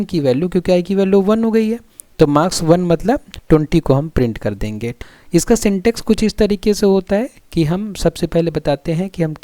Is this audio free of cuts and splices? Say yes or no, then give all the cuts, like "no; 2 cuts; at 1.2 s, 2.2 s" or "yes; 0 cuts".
no; 1 cut; at 4.9 s